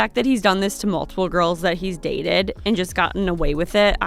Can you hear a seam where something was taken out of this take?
no; 0 cuts

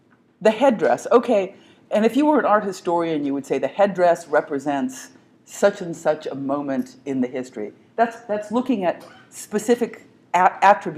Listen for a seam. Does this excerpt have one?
yes; 1 cut; at 1.4 s

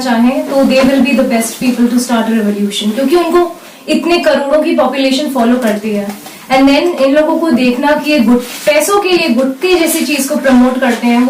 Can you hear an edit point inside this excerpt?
no; 0 cuts

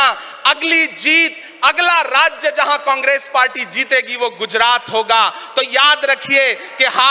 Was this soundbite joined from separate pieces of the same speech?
no; 0 cuts

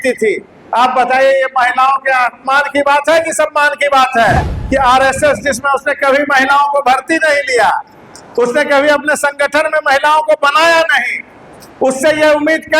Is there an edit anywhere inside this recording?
yes; 1 cut; at 4.5 s

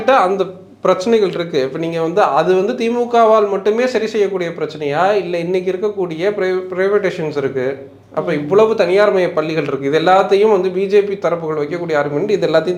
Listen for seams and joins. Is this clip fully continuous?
yes; 0 cuts

